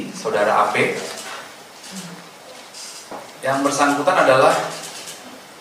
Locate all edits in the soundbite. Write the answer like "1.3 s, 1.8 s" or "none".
3.2 s

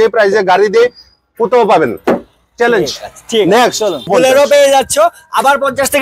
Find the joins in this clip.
4.1 s

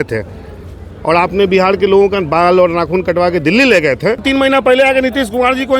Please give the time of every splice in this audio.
4.2 s

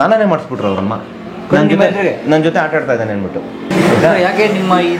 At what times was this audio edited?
3.7 s

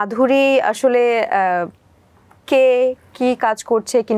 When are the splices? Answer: none

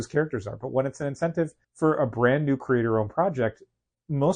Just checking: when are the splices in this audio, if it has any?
1.6 s

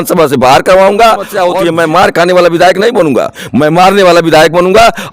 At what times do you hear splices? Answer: 1.3 s

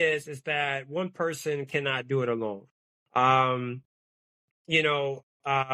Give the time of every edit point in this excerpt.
none

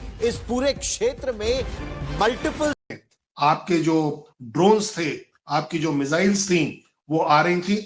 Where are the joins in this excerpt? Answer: 2.8 s

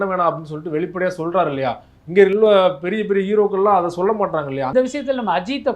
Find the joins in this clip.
4.7 s

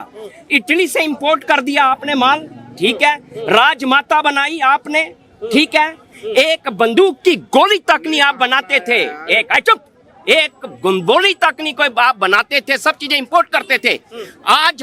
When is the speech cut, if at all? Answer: none

